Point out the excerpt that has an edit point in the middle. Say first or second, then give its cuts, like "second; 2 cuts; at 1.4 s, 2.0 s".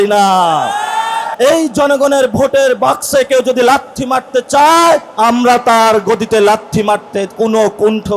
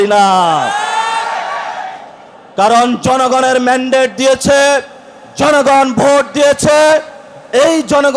first; 2 cuts; at 1.3 s, 5.1 s